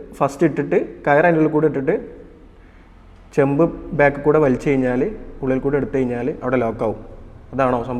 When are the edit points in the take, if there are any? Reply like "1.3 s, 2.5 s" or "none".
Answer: none